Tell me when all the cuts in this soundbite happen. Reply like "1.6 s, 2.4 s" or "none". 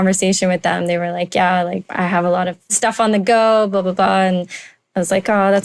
1.8 s, 2.8 s